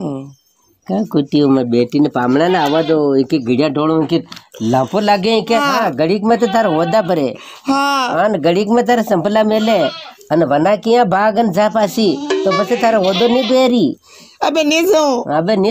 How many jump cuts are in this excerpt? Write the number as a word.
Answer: one